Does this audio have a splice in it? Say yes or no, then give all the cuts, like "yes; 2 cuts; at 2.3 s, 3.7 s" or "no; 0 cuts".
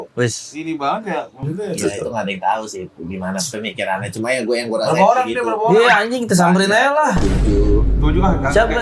no; 0 cuts